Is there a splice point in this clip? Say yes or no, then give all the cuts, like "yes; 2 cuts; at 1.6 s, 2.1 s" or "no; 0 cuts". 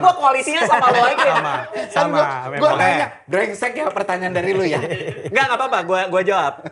no; 0 cuts